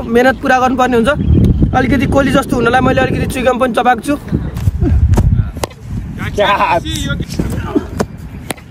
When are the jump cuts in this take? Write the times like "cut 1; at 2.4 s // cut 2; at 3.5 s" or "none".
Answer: cut 1; at 4.5 s // cut 2; at 7.2 s